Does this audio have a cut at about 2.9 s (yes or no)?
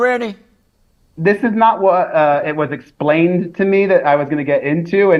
no